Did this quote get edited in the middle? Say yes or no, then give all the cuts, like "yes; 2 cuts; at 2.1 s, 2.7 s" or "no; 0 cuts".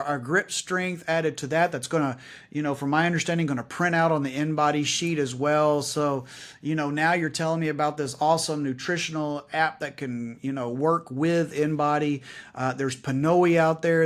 no; 0 cuts